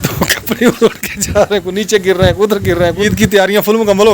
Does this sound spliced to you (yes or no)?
yes